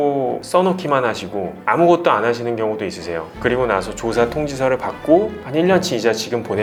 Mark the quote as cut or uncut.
uncut